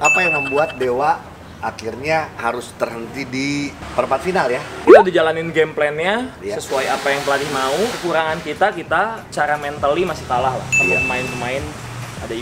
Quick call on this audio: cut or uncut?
uncut